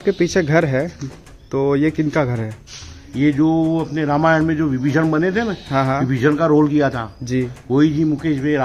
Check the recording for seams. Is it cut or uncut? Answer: uncut